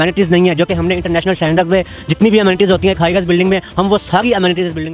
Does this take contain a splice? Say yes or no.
no